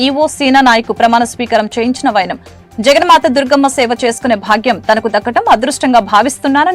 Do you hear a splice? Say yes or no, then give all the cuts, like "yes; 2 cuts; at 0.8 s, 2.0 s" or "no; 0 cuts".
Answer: no; 0 cuts